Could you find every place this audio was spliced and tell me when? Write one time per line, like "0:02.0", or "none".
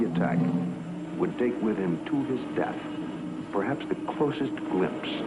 0:02.8